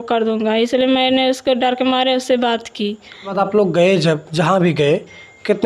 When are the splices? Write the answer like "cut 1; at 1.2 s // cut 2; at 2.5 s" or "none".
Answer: cut 1; at 3.3 s